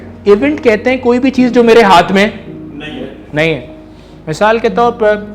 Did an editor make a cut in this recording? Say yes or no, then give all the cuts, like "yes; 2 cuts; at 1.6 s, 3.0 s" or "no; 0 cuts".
no; 0 cuts